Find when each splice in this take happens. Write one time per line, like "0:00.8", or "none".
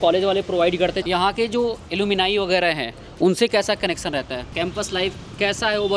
0:01.0
0:04.5